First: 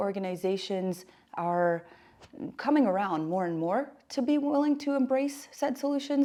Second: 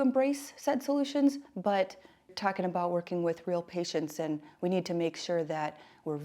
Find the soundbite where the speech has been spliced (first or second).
second